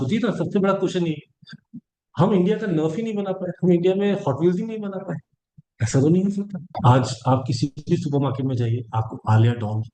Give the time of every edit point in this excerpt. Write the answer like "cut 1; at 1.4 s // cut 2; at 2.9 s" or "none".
cut 1; at 6.8 s